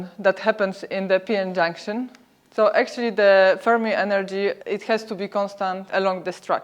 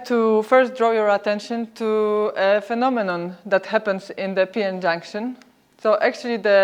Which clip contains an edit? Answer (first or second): first